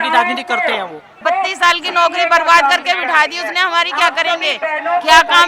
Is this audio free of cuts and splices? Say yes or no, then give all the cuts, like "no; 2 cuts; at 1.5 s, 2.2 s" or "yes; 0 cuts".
no; 1 cut; at 1.2 s